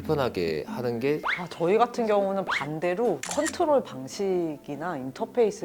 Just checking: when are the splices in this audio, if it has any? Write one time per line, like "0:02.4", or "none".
0:01.3
0:03.4